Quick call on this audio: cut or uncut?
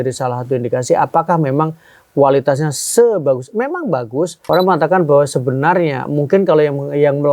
cut